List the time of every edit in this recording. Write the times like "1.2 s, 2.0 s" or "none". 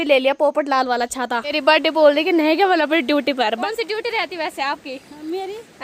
1.6 s, 3.6 s